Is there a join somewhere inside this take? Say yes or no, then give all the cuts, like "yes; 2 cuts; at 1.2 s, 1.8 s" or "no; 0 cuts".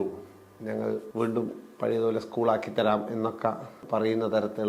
yes; 2 cuts; at 1.1 s, 3.7 s